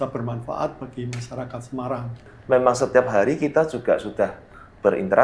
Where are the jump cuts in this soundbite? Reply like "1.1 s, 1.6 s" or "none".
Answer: 2.3 s